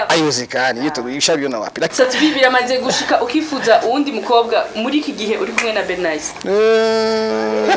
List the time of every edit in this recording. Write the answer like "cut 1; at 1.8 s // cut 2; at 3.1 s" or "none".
cut 1; at 1.9 s

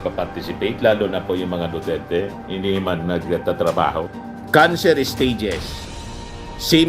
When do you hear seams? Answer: cut 1; at 4.1 s

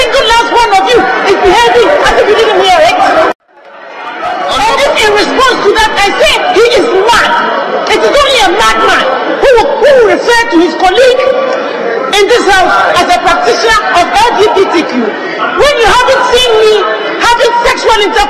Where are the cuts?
none

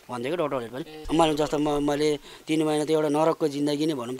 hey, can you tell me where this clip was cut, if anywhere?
cut 1; at 1.0 s

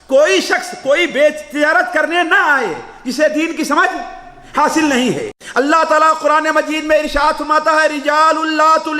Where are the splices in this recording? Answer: cut 1; at 5.4 s

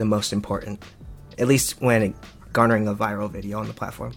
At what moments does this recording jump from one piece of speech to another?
none

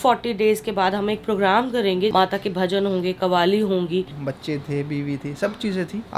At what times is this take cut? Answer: cut 1; at 2.1 s // cut 2; at 4.1 s

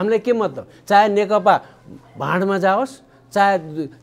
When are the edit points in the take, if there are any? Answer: none

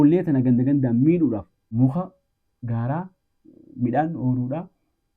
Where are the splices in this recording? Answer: cut 1; at 1.6 s

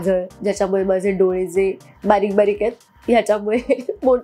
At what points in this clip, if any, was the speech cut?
none

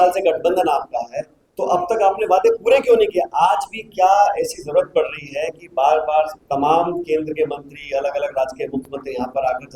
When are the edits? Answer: none

